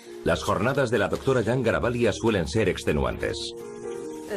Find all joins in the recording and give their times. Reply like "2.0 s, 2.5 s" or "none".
1.9 s